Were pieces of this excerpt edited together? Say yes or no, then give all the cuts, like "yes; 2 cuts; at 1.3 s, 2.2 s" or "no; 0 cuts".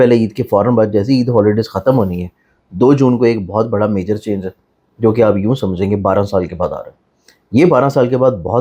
no; 0 cuts